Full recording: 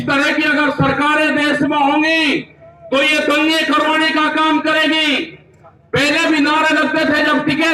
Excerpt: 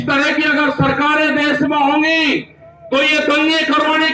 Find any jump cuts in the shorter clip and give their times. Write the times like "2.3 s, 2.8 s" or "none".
none